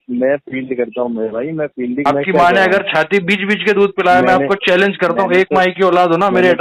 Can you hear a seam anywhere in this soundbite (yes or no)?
yes